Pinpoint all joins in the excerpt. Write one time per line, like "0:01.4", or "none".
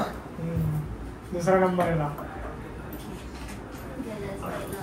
none